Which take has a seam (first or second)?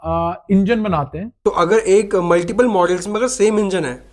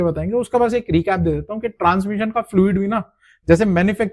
first